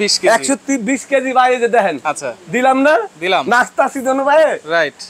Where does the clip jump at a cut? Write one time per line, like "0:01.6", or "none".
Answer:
0:02.1